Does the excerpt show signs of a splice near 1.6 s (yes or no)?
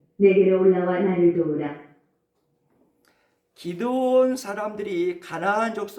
no